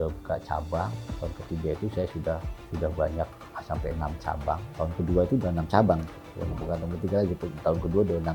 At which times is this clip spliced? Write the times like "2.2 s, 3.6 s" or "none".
1.1 s